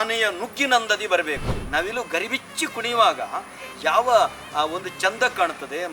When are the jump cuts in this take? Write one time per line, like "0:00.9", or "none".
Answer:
0:01.5